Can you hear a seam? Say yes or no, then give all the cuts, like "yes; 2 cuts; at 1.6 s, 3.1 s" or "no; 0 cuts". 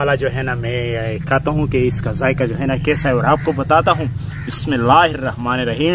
no; 0 cuts